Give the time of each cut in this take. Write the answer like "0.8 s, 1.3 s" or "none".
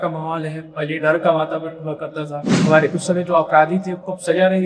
2.5 s